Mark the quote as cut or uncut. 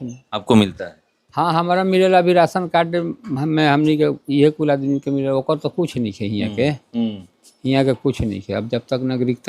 uncut